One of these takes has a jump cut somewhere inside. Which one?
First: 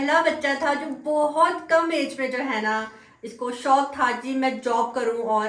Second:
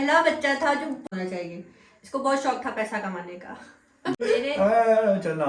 second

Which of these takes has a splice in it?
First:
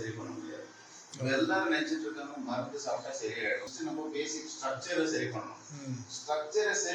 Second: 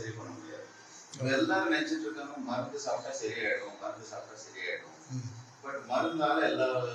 first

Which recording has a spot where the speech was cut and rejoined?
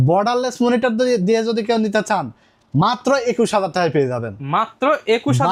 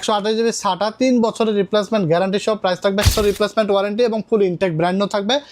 second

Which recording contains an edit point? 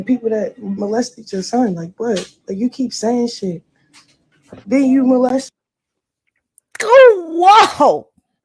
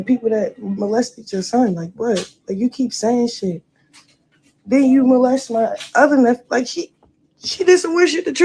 second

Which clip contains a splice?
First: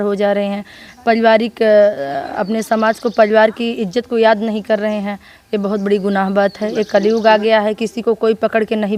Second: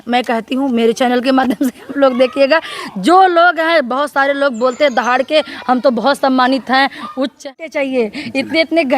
second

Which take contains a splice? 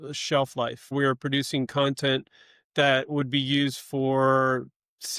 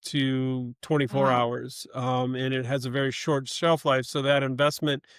first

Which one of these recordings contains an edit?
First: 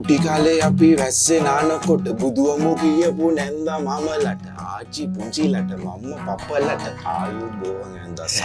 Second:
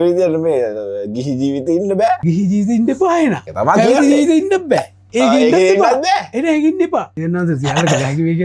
second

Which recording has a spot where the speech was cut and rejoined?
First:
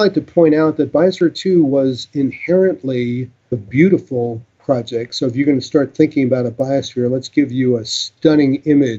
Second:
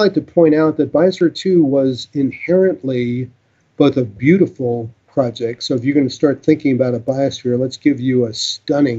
first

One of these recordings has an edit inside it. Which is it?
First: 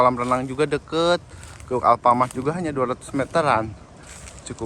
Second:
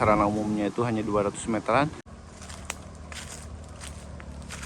second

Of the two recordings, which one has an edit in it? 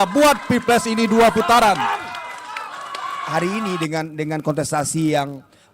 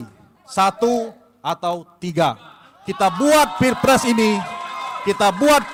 first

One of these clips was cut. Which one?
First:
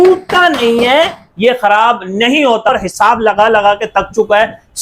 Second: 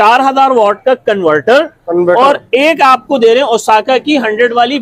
first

